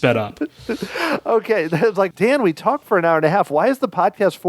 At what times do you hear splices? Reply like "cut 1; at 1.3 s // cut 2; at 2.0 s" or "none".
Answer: cut 1; at 2.1 s